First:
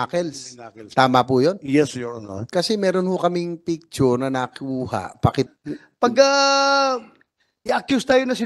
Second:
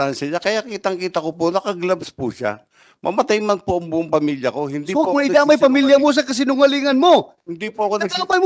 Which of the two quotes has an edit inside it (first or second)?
first